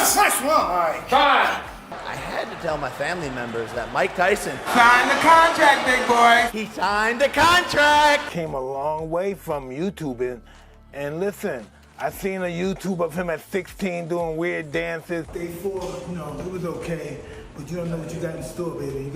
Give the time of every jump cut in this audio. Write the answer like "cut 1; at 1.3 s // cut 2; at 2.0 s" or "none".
cut 1; at 1.8 s // cut 2; at 8.3 s // cut 3; at 15.3 s